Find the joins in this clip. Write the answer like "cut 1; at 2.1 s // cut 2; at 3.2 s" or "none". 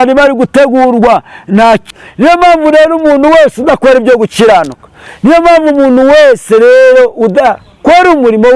cut 1; at 1.8 s